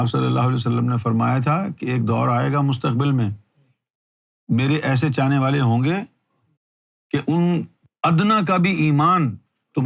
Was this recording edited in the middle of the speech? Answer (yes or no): yes